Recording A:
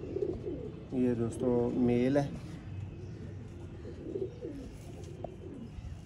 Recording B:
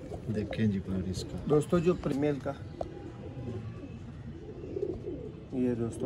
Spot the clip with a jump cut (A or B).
B